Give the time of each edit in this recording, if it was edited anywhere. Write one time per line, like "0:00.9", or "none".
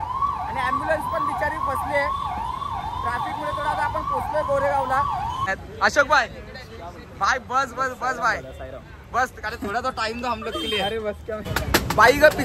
0:05.5
0:11.5